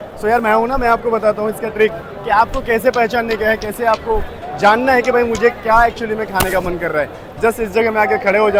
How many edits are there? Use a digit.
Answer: 0